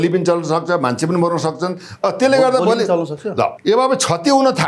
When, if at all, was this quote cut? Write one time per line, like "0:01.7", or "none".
0:03.6